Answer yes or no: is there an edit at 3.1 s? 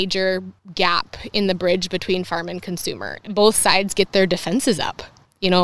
yes